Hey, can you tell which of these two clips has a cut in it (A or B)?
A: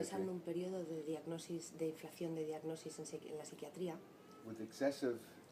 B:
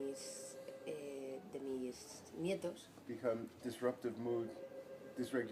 B